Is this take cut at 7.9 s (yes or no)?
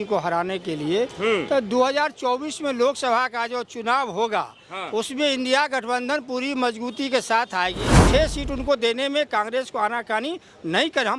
yes